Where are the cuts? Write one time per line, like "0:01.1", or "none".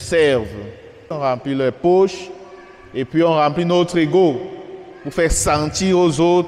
0:01.1